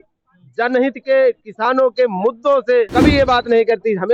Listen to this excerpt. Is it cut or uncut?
cut